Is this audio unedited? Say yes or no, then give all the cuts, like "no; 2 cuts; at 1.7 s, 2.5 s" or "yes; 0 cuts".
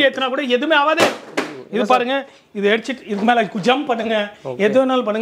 yes; 0 cuts